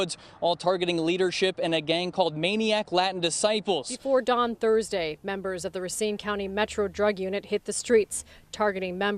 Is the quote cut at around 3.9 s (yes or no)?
yes